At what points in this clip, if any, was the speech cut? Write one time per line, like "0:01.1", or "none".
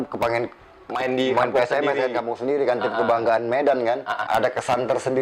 0:04.2